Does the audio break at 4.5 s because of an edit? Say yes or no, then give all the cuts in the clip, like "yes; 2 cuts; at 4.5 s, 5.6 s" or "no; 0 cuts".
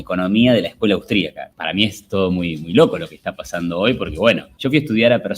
yes; 2 cuts; at 1.4 s, 4.5 s